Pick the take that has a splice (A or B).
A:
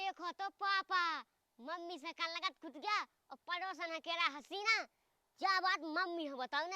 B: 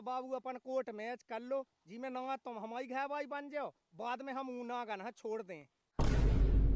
B